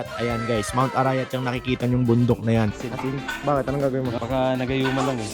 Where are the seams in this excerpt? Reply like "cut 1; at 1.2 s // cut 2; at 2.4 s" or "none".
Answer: cut 1; at 2.7 s // cut 2; at 4.2 s